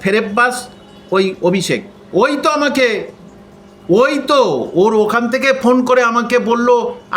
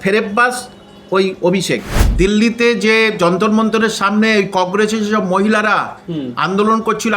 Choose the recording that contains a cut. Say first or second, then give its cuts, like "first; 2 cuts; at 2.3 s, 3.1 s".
second; 1 cut; at 2.0 s